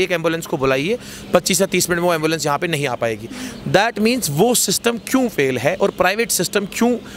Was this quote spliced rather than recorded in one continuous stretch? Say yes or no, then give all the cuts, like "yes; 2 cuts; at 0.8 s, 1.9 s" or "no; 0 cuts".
no; 0 cuts